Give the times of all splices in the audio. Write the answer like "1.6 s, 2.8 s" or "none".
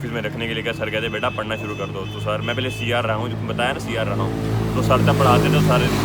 none